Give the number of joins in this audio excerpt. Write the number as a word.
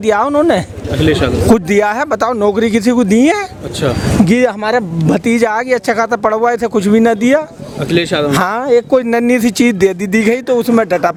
zero